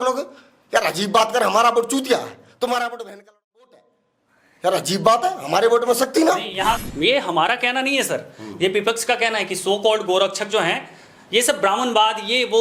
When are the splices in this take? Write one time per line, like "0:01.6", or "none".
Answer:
0:06.8